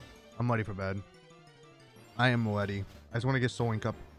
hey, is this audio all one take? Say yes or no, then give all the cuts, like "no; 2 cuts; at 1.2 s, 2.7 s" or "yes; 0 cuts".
yes; 0 cuts